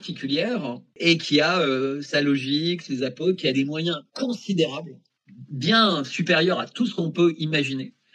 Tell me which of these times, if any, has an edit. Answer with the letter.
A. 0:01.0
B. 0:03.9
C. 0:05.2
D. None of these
A